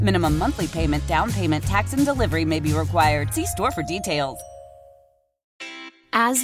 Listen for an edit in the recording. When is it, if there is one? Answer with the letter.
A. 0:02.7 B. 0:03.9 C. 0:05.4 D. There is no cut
C